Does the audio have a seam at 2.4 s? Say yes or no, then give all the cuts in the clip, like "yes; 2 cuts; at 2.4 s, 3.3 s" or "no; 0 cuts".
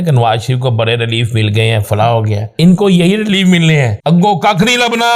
yes; 2 cuts; at 2.4 s, 3.9 s